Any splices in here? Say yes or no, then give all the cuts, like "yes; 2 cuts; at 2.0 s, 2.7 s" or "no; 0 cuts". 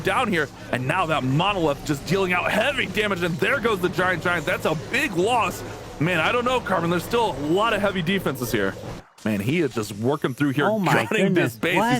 yes; 1 cut; at 9.1 s